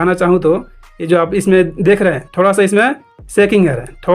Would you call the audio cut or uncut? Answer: uncut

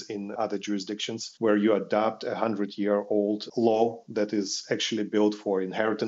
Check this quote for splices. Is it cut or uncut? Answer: uncut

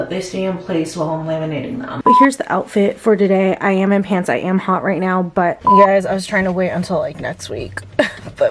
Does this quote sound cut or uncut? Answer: cut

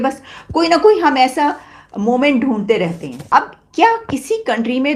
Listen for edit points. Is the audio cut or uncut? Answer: cut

